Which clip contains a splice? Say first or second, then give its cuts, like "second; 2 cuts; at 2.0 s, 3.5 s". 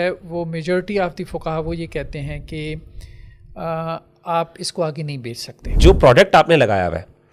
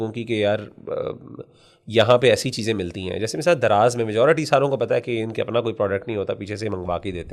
first; 1 cut; at 5.8 s